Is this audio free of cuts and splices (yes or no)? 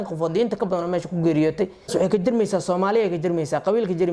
no